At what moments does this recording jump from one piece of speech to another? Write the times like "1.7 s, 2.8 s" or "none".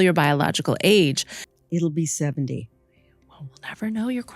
1.6 s